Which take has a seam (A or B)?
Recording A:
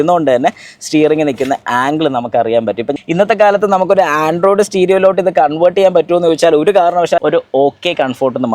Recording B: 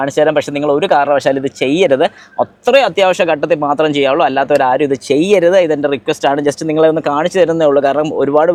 A